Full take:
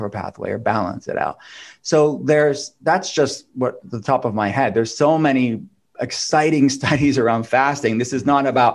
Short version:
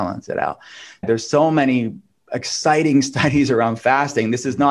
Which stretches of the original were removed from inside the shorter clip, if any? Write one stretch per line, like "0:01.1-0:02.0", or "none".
0:01.8-0:04.7